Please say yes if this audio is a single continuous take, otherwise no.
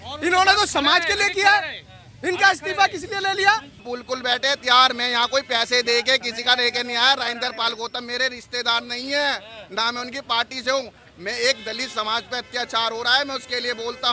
no